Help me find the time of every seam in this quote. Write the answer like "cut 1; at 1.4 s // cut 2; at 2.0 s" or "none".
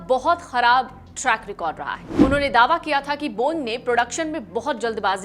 cut 1; at 2.2 s